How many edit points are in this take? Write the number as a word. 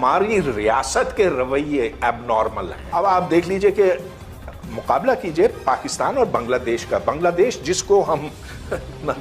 one